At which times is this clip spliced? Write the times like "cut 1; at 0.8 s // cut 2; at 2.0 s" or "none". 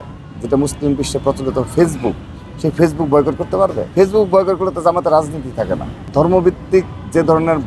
cut 1; at 3.8 s // cut 2; at 5.9 s